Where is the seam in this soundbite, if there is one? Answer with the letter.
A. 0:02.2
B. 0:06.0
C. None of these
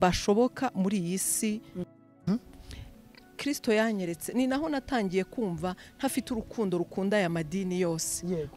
A